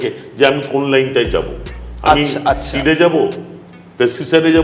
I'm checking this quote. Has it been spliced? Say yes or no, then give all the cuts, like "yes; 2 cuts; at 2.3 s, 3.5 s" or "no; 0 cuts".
no; 0 cuts